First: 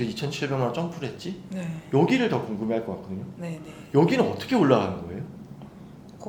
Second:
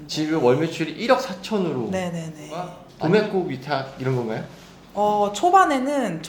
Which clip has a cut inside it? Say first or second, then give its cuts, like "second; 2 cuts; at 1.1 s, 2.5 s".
second; 1 cut; at 2.8 s